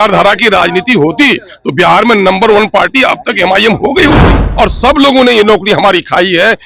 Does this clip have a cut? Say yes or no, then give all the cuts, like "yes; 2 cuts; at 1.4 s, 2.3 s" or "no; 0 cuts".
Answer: yes; 1 cut; at 4.4 s